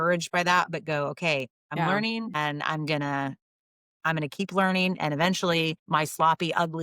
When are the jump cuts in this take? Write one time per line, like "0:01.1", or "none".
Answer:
0:01.5
0:05.8